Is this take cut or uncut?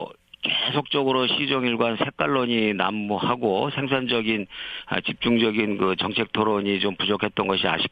uncut